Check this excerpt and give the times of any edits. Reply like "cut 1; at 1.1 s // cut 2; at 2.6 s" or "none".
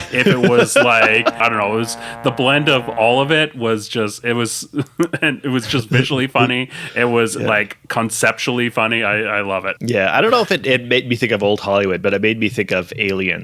cut 1; at 1.4 s // cut 2; at 9.7 s